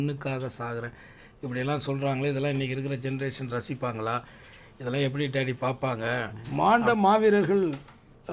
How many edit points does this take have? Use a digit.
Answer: 1